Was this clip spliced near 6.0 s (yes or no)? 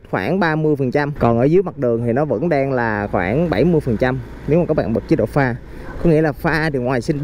no